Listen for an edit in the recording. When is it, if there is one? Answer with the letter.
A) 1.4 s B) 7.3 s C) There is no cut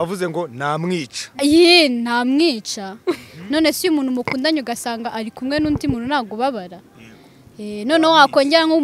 A